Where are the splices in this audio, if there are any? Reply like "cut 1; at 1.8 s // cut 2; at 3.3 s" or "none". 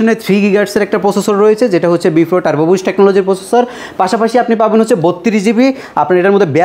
none